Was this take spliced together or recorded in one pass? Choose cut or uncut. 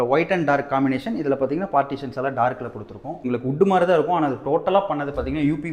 cut